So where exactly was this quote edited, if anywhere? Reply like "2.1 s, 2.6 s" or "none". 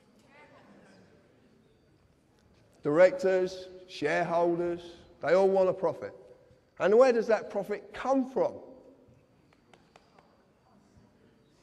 none